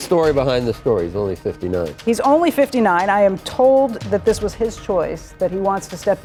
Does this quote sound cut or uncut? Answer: uncut